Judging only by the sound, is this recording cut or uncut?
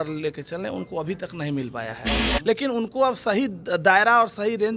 cut